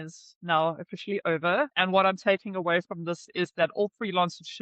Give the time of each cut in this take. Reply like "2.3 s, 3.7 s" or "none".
1.7 s